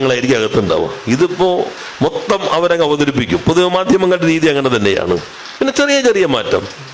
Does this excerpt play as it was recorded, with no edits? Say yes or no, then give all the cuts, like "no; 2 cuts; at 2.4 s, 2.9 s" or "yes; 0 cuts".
no; 1 cut; at 5.4 s